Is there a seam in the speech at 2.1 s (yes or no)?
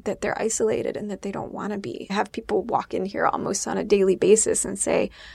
yes